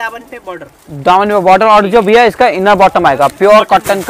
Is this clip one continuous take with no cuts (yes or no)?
yes